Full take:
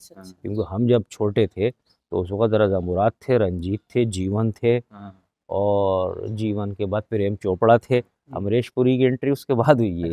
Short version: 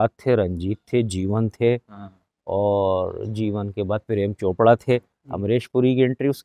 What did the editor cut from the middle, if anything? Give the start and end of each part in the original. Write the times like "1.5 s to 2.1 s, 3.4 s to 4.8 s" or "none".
none